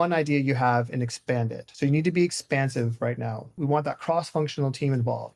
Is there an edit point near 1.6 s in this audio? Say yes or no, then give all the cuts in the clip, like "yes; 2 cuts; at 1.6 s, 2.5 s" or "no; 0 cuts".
yes; 2 cuts; at 1.6 s, 3.5 s